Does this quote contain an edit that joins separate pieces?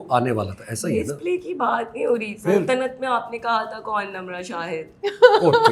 no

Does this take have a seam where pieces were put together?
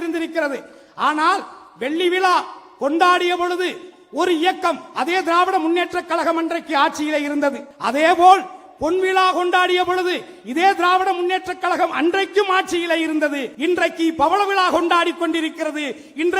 yes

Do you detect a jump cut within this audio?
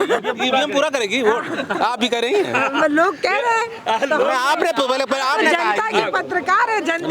no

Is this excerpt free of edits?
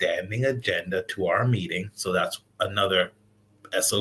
yes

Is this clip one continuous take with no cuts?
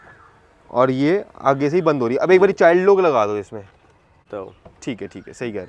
yes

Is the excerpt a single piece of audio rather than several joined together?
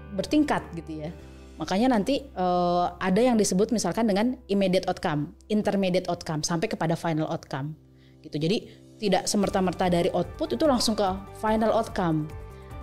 yes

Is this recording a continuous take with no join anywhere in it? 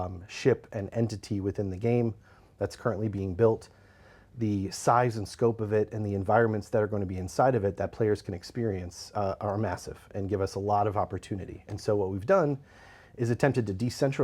yes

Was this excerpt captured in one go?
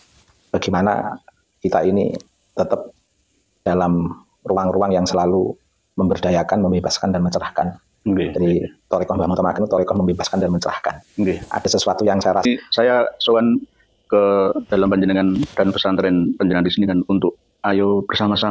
no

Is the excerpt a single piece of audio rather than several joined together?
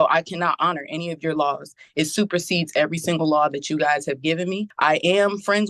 no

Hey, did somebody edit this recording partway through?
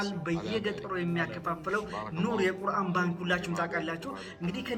no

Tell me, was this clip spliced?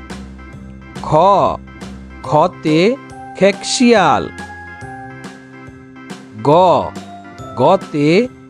yes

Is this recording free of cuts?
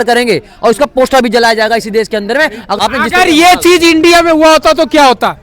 no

